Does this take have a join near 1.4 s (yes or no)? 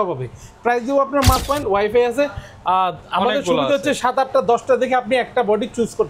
yes